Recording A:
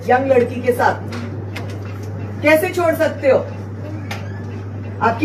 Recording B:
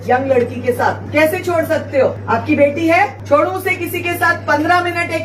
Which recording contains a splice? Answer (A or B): B